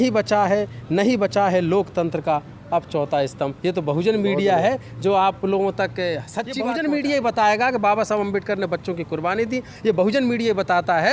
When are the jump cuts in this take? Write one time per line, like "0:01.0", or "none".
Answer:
0:06.6